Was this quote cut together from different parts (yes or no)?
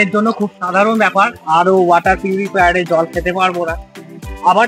no